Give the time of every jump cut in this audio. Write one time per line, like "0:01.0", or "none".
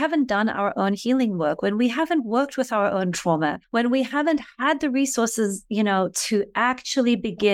0:03.6